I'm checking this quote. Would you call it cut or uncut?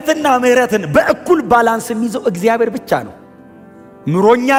uncut